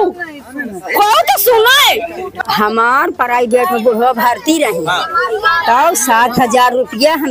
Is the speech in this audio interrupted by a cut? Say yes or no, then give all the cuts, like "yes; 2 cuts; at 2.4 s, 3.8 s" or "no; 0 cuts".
yes; 1 cut; at 2.4 s